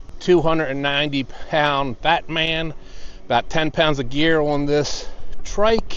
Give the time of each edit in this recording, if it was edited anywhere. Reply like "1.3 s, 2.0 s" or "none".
none